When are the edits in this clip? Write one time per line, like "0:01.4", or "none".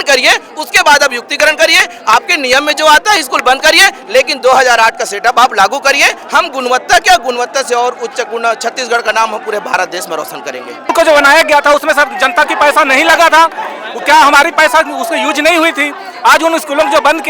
0:10.9